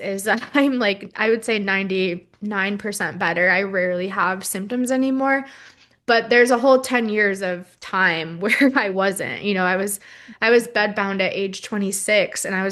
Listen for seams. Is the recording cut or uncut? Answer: uncut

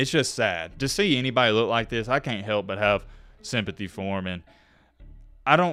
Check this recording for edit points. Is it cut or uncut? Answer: uncut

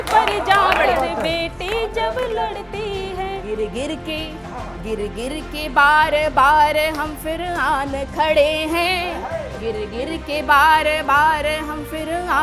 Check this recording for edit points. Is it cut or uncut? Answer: cut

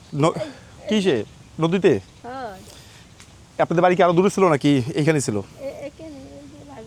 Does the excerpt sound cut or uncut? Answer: uncut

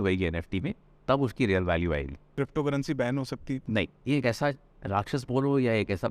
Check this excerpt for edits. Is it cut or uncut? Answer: cut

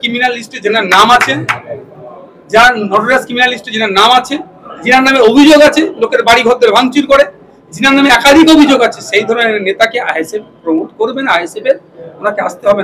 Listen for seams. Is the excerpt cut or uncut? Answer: uncut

